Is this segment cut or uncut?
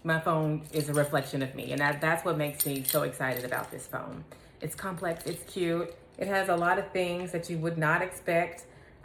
uncut